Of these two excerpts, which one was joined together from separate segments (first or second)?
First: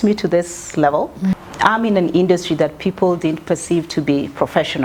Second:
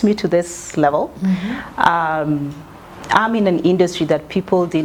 first